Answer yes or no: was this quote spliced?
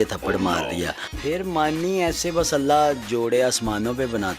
yes